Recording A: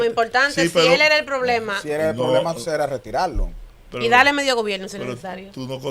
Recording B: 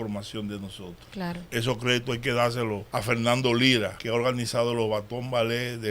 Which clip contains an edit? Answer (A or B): B